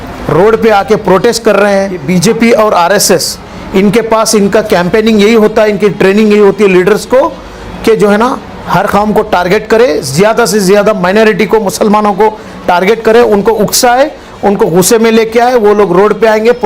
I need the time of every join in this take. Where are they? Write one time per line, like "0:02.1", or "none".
0:02.0